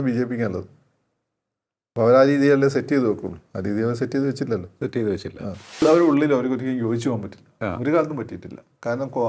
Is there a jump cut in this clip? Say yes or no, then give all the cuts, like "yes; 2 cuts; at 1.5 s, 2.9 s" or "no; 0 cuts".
yes; 1 cut; at 5.8 s